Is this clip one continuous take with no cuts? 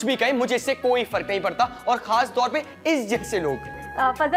yes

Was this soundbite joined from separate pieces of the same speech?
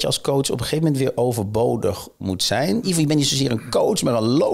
yes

